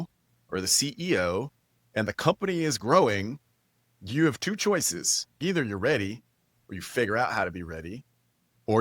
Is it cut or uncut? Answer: cut